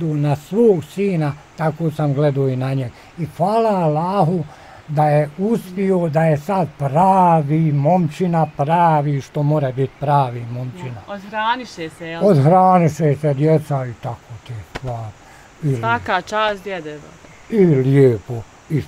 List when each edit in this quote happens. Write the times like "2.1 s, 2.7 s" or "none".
none